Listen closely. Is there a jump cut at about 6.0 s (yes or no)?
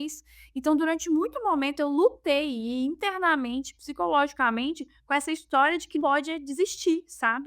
yes